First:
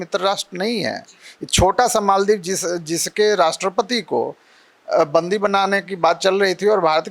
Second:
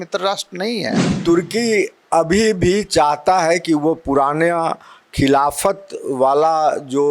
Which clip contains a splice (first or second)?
second